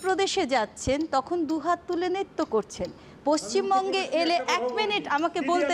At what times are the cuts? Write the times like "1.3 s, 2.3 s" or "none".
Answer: none

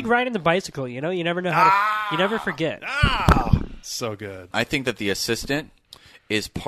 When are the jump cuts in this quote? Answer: 4.5 s

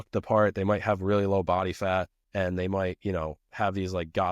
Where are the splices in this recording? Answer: 2.2 s

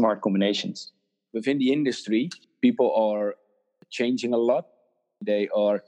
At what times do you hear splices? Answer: 0.9 s

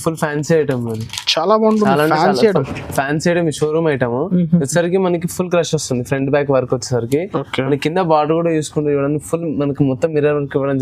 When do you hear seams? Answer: none

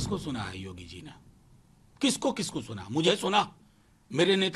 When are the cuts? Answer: none

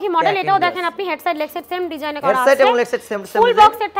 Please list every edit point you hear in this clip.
none

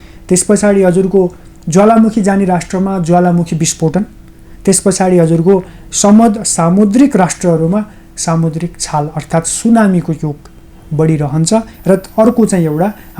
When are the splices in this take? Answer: none

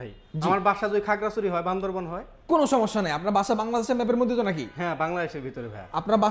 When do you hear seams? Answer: none

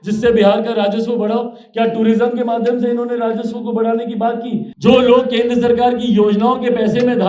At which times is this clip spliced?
4.7 s

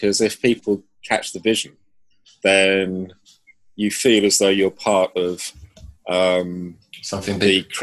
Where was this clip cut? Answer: none

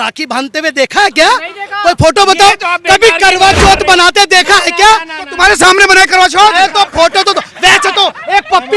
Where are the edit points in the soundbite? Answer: none

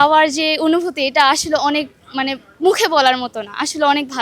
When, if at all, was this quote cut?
2.4 s

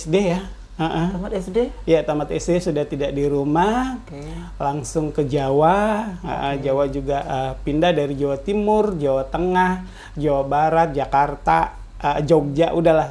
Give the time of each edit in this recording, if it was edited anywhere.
none

